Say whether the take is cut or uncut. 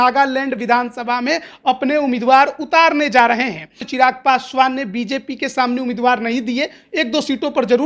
cut